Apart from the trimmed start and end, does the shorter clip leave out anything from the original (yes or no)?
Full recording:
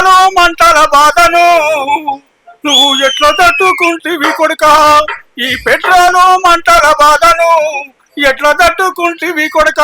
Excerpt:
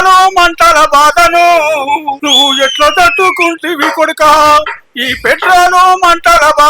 yes